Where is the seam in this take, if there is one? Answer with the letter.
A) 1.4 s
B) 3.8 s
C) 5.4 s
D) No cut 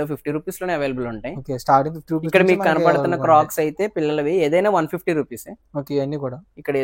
D